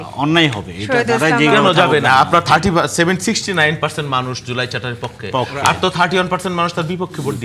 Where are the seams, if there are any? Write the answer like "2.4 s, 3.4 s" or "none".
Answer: none

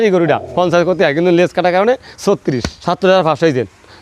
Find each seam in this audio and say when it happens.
2.7 s

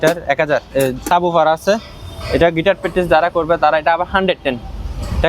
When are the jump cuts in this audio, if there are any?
1.0 s

